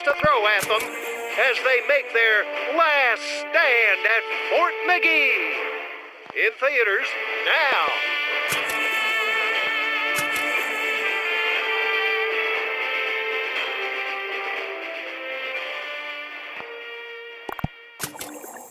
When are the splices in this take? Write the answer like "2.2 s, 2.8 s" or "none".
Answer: none